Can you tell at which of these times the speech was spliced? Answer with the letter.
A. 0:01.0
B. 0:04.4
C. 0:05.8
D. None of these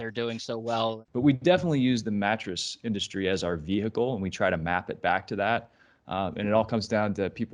A